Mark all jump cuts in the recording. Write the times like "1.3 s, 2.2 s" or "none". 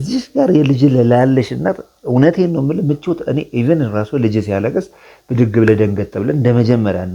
none